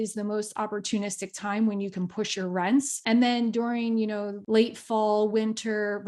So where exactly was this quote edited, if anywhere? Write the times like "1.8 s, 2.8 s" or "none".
3.0 s, 4.3 s